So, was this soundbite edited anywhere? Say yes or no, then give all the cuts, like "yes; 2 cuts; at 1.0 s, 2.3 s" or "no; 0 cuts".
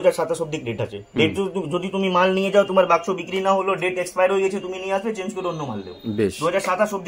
no; 0 cuts